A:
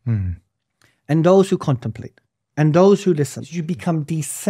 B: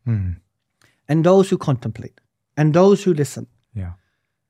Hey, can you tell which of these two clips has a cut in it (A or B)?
A